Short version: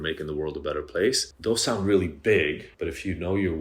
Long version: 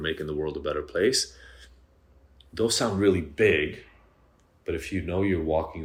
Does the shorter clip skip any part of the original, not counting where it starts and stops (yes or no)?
yes